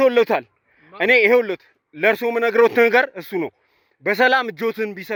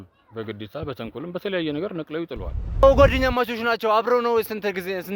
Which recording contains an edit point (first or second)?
second